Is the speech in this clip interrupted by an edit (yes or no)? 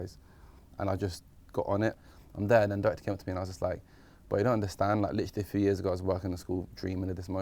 yes